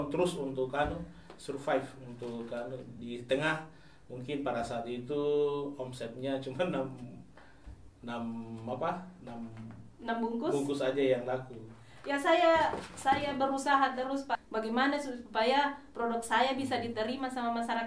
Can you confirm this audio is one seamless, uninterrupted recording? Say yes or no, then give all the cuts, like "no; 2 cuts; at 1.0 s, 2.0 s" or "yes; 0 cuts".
no; 1 cut; at 14.4 s